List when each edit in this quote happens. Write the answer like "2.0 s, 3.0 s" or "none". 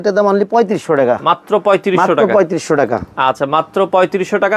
none